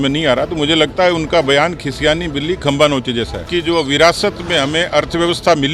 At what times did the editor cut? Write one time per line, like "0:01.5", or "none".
0:03.4